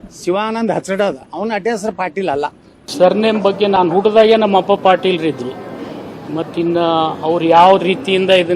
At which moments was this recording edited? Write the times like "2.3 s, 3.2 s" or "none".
2.9 s